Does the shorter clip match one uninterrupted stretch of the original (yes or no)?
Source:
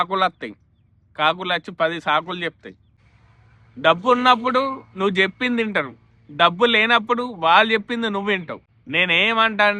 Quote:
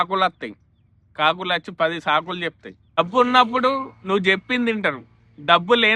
no